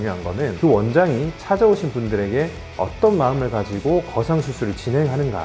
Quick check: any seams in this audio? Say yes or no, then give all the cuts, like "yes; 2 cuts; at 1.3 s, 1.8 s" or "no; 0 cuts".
no; 0 cuts